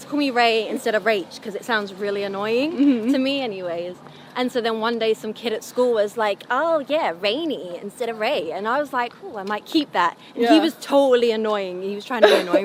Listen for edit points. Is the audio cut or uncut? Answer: uncut